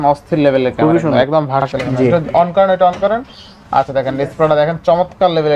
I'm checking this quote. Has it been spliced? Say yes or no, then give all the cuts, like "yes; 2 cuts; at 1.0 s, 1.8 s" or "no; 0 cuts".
yes; 1 cut; at 1.6 s